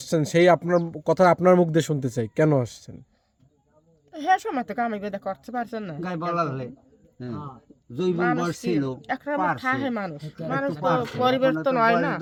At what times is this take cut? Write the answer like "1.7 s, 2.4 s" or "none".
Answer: none